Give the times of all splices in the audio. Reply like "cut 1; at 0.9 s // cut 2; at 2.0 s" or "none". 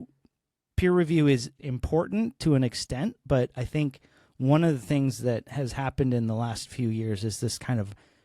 cut 1; at 1.5 s